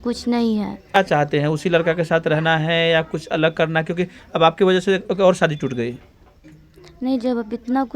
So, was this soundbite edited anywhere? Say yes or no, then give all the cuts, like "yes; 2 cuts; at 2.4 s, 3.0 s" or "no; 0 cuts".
yes; 1 cut; at 0.9 s